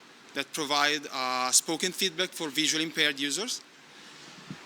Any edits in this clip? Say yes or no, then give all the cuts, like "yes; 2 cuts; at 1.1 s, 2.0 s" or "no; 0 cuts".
no; 0 cuts